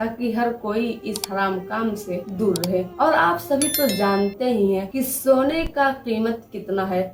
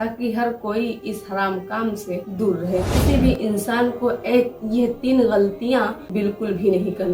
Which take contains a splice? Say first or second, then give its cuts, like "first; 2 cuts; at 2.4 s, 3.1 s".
second; 2 cuts; at 2.9 s, 6.0 s